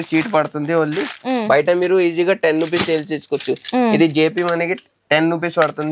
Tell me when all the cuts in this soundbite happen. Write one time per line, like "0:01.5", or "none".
none

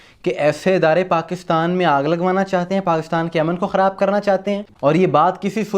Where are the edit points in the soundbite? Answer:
0:04.7

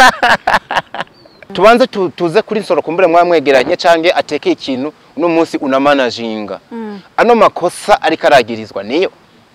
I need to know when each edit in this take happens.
0:01.6

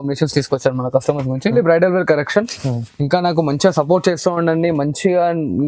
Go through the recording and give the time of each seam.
0:01.5

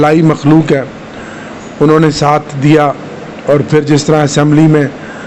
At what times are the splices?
none

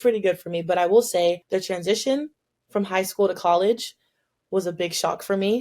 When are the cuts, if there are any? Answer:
0:01.4

